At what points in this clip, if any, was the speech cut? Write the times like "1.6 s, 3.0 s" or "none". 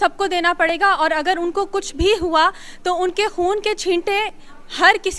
none